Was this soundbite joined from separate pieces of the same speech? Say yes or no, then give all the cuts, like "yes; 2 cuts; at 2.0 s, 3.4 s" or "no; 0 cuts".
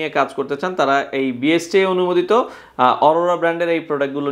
no; 0 cuts